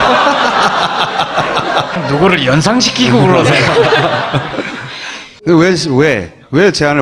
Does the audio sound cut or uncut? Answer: cut